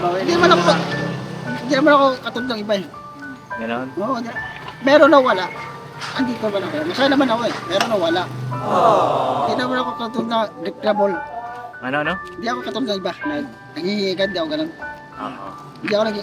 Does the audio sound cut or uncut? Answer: uncut